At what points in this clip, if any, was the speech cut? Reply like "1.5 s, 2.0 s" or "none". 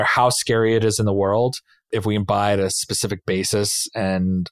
1.7 s